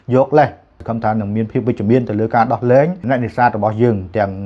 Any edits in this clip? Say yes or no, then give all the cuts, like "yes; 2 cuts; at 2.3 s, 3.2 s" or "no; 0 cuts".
yes; 2 cuts; at 0.9 s, 3.0 s